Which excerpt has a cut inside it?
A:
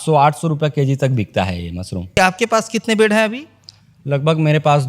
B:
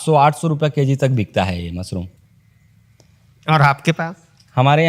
A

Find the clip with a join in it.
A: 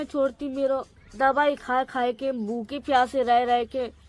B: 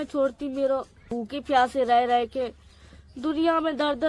B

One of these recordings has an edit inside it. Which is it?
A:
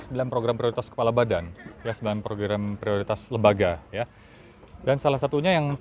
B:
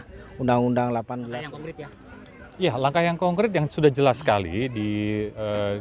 B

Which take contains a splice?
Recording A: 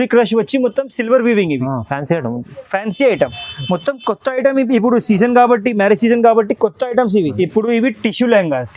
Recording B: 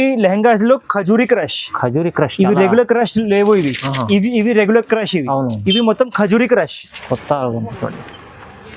A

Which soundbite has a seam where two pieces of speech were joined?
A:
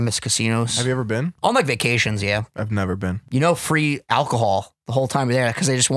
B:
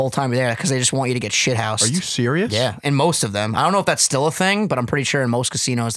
A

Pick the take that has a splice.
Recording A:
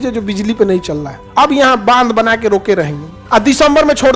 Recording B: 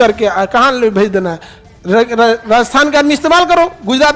A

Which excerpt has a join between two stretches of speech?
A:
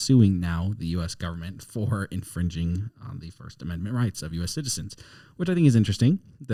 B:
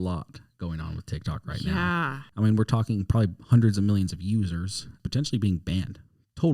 B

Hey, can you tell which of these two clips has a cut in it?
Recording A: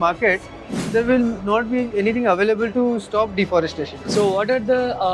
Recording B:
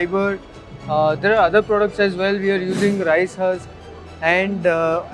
A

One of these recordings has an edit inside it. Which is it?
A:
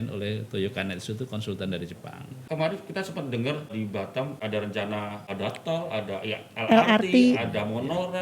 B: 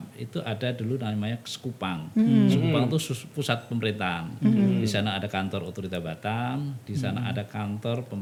A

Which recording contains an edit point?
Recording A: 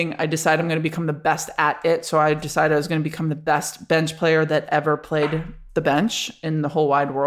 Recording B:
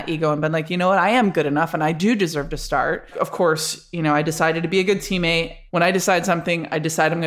B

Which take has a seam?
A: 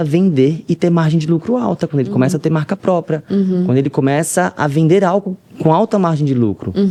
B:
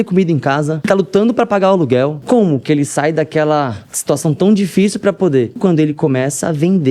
B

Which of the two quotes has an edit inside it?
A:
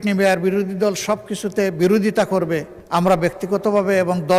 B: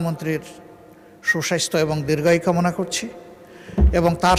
A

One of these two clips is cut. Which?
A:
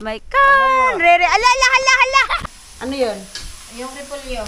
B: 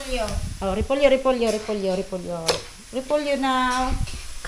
A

